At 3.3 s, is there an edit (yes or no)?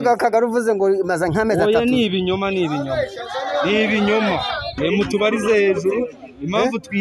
no